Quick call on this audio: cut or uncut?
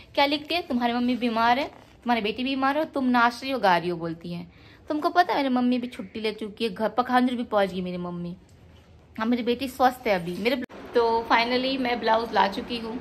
cut